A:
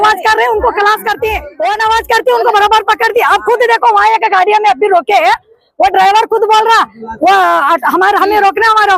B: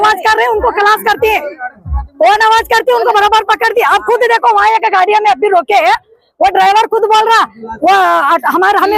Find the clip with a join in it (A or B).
A